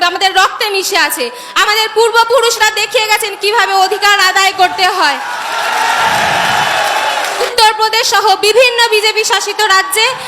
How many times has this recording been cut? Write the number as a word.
one